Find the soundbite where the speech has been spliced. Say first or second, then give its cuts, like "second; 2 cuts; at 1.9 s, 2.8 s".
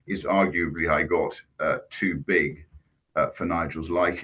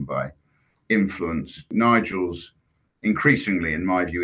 second; 1 cut; at 1.7 s